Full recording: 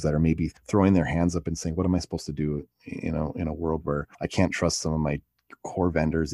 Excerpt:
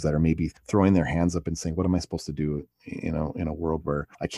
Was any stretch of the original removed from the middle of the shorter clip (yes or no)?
no